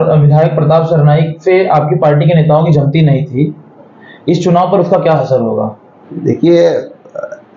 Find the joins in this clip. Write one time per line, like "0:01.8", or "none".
none